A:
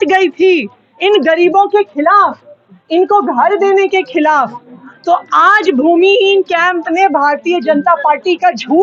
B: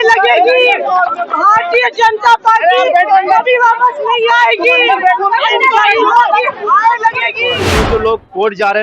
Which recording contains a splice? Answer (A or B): B